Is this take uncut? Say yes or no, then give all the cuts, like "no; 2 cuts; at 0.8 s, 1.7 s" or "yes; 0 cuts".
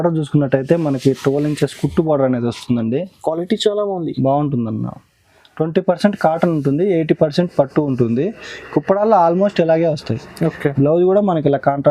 yes; 0 cuts